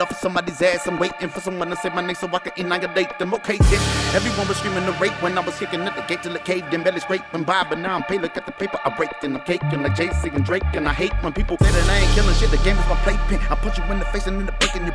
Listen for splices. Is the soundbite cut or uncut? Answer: uncut